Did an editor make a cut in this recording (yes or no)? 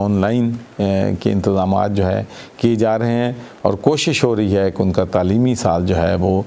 no